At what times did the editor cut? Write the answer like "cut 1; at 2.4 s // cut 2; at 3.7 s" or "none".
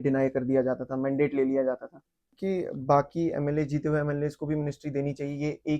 cut 1; at 2.3 s